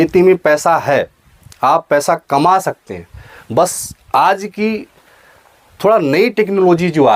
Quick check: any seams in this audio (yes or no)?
no